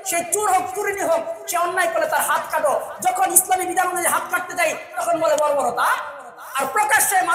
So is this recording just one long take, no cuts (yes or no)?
yes